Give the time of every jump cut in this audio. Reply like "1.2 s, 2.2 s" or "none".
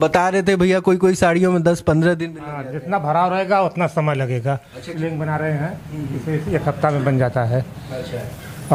none